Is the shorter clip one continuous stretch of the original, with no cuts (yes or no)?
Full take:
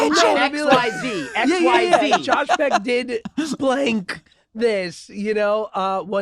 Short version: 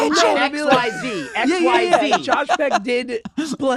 yes